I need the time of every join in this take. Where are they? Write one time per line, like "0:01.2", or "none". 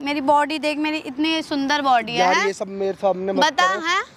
none